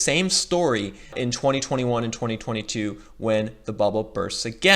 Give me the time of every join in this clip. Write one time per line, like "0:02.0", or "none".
0:01.1